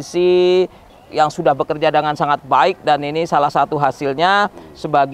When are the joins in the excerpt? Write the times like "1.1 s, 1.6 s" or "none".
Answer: 1.0 s